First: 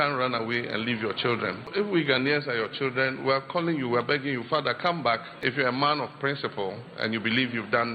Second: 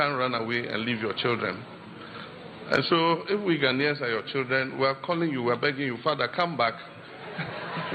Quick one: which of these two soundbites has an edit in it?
first; 2 cuts; at 1.7 s, 5.4 s

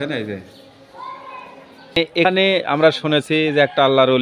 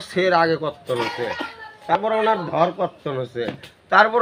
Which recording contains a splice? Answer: first; 1 cut; at 2.0 s

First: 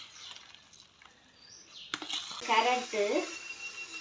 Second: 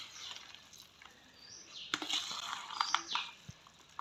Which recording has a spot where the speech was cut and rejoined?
first; 1 cut; at 2.3 s

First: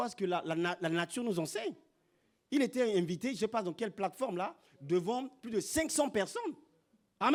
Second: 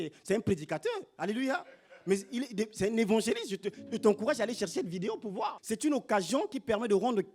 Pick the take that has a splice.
second; 1 cut; at 5.6 s

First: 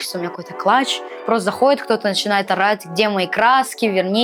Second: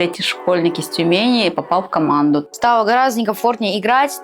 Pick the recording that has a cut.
second; 1 cut; at 2.5 s

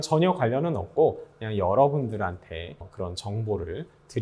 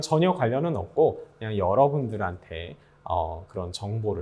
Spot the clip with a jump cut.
first; 1 cut; at 2.9 s

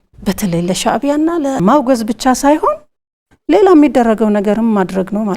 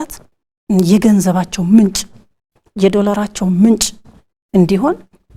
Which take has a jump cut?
first; 1 cut; at 1.6 s

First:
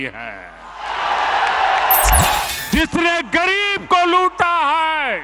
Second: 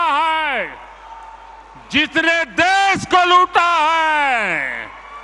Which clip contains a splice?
first; 1 cut; at 2.4 s

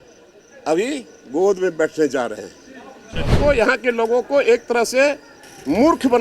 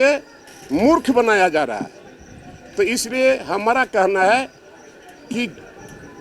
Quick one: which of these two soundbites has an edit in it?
first; 1 cut; at 3.4 s

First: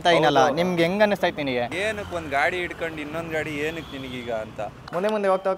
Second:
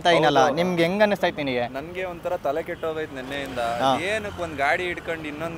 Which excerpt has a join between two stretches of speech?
first; 2 cuts; at 1.7 s, 4.8 s

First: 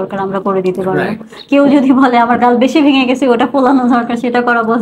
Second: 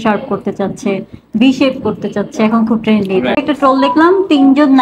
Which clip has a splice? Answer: second; 1 cut; at 3.4 s

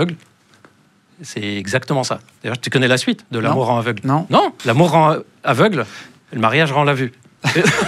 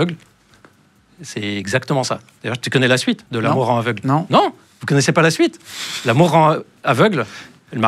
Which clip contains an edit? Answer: first; 1 cut; at 4.6 s

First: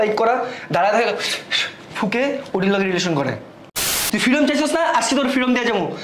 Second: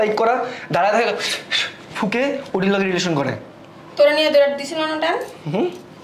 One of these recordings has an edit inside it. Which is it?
first; 1 cut; at 3.8 s

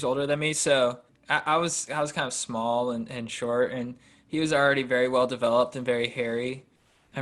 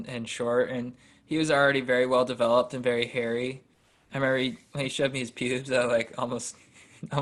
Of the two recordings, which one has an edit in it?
first; 1 cut; at 1.1 s

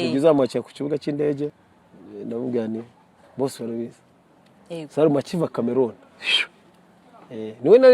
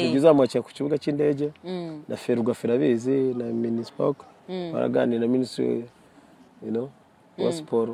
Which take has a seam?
first; 1 cut; at 1.7 s

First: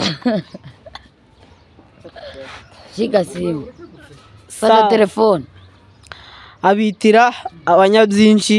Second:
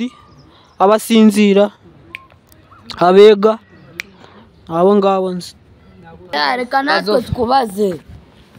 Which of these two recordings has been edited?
second; 1 cut; at 6.3 s

